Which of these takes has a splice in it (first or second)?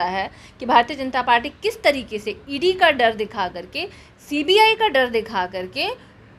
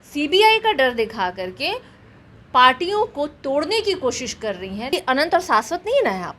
second